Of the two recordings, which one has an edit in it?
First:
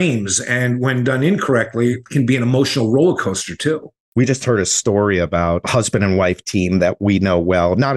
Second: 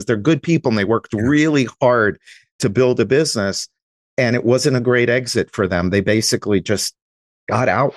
first; 3 cuts; at 2.0 s, 3.9 s, 5.6 s

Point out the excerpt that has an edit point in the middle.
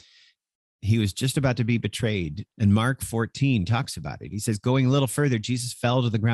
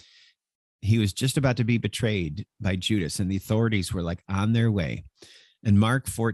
first; 1 cut; at 2.4 s

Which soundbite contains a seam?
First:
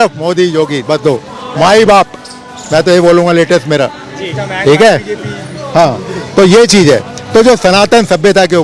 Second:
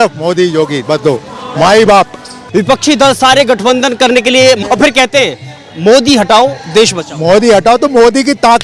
second; 2 cuts; at 2.4 s, 4.6 s

